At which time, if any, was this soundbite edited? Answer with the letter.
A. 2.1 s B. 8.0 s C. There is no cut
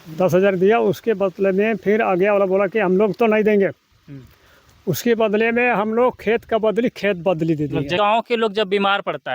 B